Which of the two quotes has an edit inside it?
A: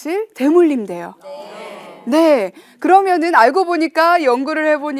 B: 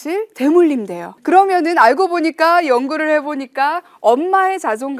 B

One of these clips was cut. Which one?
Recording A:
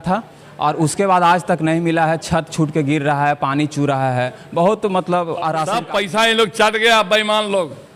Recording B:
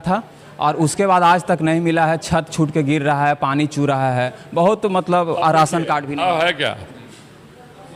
A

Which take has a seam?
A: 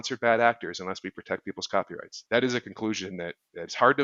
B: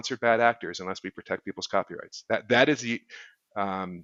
A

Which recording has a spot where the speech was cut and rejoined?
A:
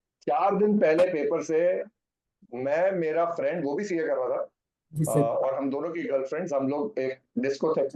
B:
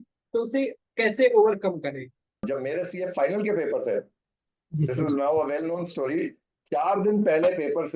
B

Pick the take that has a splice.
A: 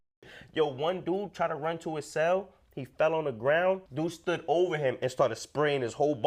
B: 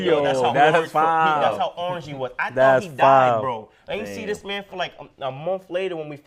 A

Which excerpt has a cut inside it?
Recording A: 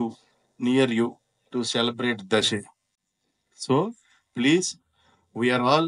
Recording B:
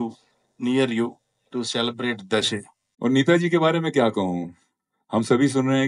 B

